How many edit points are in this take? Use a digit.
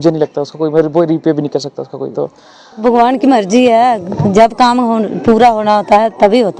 1